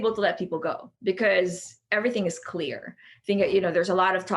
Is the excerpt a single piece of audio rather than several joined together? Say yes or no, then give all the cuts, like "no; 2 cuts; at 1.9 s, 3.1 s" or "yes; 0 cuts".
no; 1 cut; at 3.1 s